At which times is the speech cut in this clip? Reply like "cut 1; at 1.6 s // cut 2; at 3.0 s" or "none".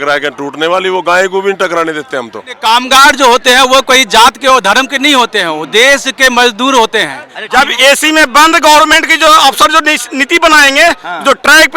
cut 1; at 2.5 s // cut 2; at 7.3 s